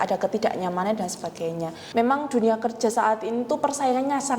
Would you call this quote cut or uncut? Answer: cut